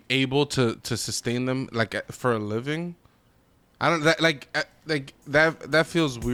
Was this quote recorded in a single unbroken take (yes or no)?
yes